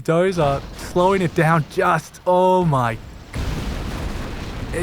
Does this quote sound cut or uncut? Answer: cut